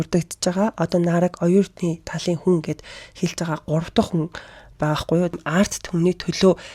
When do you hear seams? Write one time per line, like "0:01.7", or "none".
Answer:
0:05.3